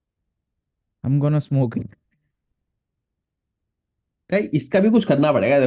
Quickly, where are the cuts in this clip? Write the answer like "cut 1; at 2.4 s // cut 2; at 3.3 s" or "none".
none